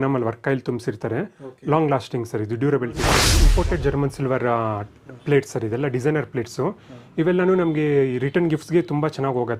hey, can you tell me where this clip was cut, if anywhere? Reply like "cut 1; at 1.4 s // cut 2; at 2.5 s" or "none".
cut 1; at 3.3 s